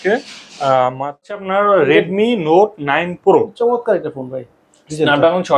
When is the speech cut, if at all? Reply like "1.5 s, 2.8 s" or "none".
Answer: 1.3 s